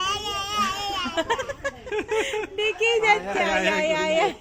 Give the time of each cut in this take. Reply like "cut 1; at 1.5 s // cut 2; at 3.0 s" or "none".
none